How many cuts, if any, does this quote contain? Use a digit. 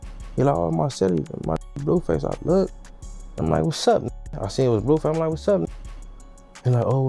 0